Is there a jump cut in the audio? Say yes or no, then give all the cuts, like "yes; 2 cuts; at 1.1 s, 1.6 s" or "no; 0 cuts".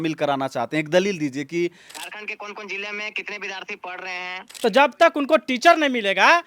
yes; 2 cuts; at 1.9 s, 4.5 s